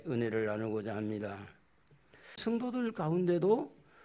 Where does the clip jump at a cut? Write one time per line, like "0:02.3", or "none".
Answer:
0:02.4